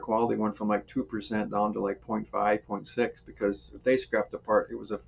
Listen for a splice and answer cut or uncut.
uncut